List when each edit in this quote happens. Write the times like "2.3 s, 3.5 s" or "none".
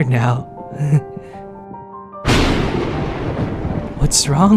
none